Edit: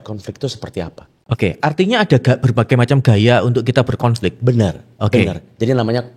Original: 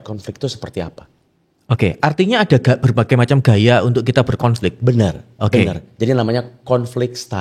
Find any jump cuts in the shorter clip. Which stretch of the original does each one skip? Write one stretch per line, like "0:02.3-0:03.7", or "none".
0:01.1-0:01.5